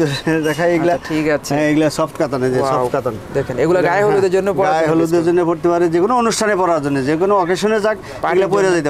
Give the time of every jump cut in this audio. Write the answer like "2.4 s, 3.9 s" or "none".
none